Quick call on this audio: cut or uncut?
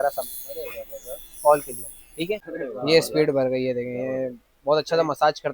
cut